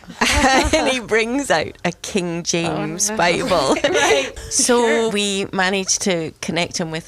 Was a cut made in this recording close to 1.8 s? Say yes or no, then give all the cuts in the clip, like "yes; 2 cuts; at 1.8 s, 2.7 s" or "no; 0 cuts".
no; 2 cuts; at 4.3 s, 5.1 s